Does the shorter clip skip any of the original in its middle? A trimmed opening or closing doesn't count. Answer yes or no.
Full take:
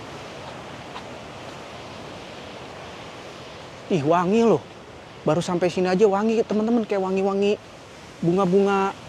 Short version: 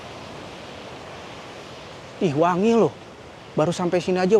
no